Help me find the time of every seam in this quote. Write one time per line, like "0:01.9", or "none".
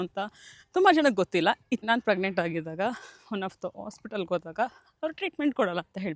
0:01.8